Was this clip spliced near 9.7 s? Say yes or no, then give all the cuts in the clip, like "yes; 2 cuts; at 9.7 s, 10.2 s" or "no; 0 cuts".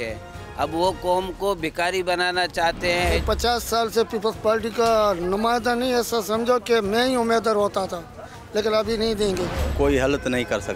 yes; 2 cuts; at 3.2 s, 9.7 s